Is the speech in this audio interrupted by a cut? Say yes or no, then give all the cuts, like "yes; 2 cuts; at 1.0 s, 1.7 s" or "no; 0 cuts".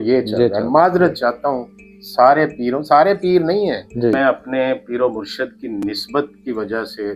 yes; 1 cut; at 4.2 s